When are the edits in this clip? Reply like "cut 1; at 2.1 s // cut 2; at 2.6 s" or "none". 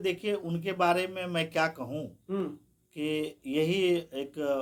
none